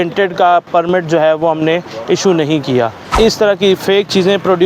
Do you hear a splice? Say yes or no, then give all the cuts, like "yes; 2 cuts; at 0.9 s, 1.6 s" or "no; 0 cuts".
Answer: yes; 1 cut; at 3.0 s